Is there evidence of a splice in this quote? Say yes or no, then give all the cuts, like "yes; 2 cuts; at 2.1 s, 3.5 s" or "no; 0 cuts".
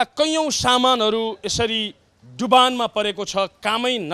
no; 0 cuts